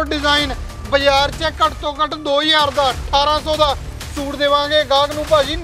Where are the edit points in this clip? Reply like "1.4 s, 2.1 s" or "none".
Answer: none